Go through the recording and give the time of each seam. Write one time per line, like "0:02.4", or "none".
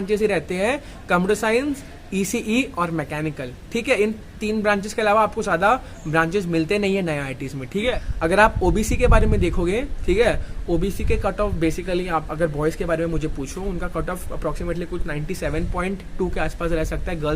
0:07.9